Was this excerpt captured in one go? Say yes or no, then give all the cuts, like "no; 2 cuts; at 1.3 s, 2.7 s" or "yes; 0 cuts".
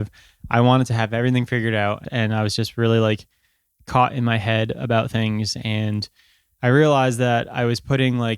no; 1 cut; at 2.0 s